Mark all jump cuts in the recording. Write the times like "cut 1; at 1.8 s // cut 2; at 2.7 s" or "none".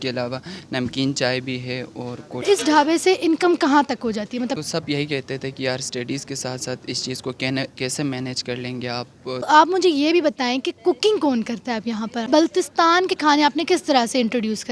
cut 1; at 2.4 s // cut 2; at 4.6 s // cut 3; at 9.5 s // cut 4; at 12.3 s